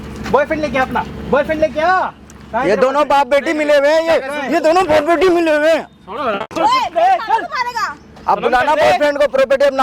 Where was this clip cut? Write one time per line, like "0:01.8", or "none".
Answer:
none